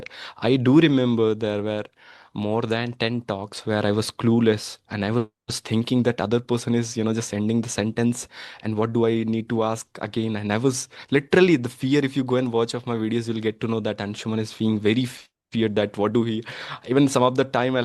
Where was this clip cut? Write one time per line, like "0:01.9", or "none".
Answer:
none